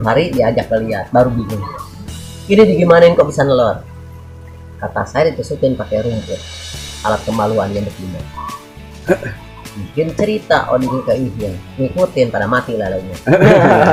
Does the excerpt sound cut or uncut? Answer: uncut